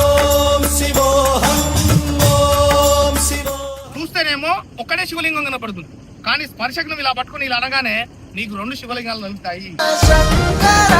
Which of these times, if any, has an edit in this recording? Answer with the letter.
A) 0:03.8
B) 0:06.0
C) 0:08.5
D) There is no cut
A